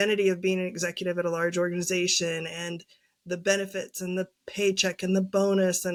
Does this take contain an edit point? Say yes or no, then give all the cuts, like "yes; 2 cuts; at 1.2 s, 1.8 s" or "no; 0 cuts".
no; 0 cuts